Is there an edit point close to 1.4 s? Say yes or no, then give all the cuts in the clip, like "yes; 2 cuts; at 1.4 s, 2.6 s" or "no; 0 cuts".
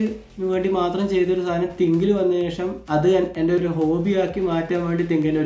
no; 1 cut; at 3.6 s